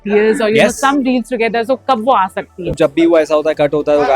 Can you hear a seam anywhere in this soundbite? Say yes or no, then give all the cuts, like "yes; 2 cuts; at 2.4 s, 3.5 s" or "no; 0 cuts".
yes; 1 cut; at 2.7 s